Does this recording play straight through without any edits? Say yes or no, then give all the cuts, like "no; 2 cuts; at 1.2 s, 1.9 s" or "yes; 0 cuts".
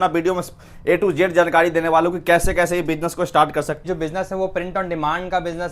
no; 1 cut; at 3.8 s